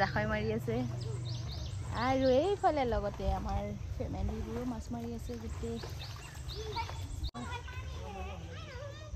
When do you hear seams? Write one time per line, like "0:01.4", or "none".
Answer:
0:07.3